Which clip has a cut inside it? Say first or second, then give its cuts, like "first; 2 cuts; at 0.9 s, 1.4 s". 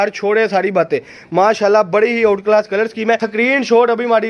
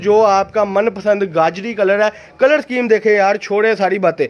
first; 1 cut; at 3.3 s